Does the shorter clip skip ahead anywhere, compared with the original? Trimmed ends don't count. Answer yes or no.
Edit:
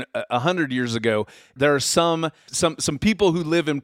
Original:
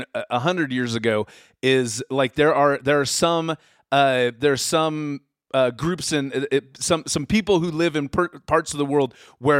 yes